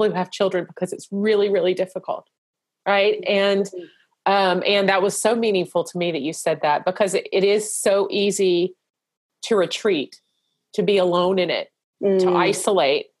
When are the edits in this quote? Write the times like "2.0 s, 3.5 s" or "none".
none